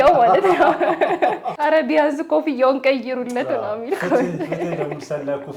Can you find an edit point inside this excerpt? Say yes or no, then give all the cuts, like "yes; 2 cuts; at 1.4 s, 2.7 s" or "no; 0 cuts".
yes; 1 cut; at 1.5 s